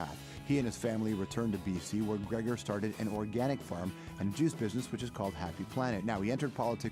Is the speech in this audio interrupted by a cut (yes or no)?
no